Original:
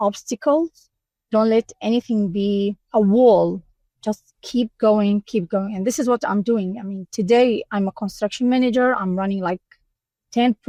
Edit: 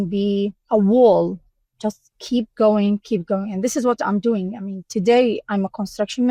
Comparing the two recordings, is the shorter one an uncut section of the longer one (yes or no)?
yes